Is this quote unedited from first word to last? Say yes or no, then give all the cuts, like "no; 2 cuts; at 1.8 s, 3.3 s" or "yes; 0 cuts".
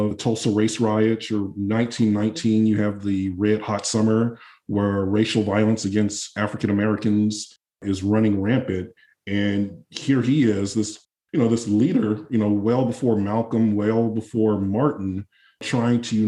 yes; 0 cuts